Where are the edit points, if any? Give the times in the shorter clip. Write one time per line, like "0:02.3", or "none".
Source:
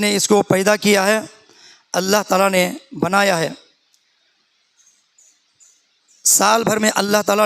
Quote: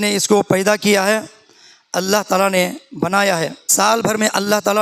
0:03.6